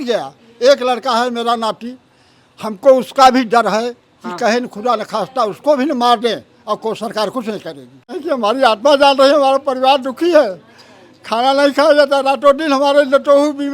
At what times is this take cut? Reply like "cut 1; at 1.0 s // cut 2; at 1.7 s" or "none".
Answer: cut 1; at 8.2 s